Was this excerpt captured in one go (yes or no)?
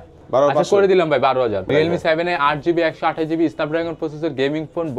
no